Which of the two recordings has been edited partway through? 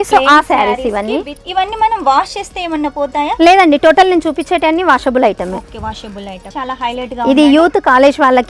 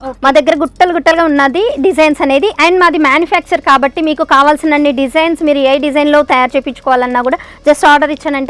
first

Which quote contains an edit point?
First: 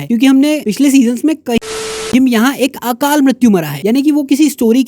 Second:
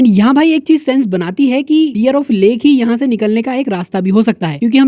first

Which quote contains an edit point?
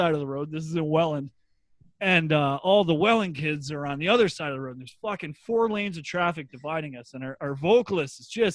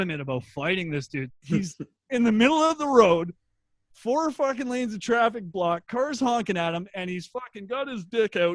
second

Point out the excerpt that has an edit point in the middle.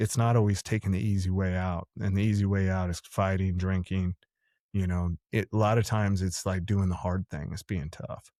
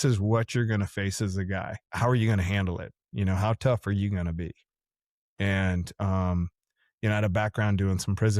second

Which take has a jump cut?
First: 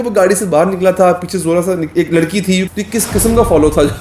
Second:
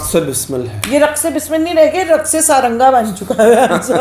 first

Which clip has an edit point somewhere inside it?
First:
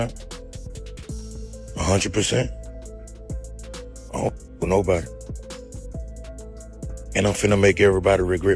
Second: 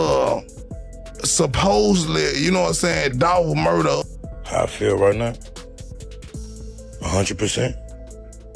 second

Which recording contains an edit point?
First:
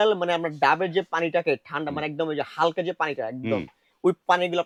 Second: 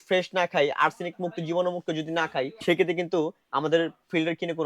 second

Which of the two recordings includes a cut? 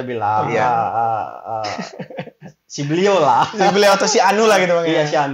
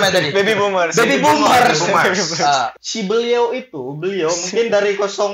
second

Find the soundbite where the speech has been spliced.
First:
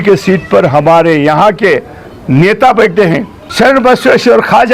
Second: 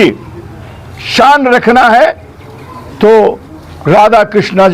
first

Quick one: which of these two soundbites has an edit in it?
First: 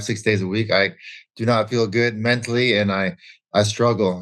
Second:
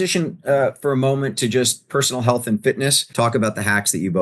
second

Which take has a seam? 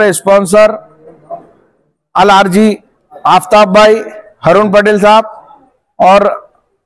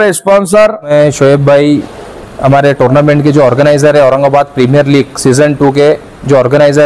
second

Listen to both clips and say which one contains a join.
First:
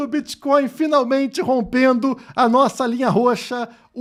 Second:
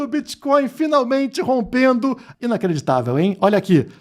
second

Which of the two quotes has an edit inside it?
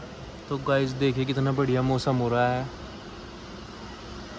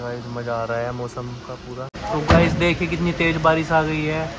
second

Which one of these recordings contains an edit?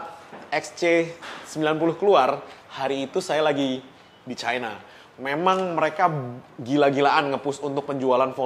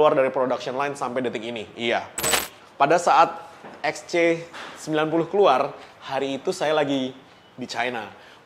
second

